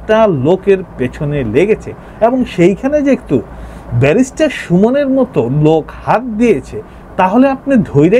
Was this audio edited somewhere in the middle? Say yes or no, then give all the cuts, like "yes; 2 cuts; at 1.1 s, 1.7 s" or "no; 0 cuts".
no; 0 cuts